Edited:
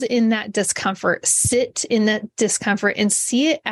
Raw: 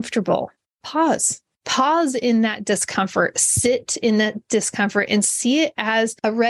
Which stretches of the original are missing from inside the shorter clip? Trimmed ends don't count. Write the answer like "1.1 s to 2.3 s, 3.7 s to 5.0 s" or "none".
none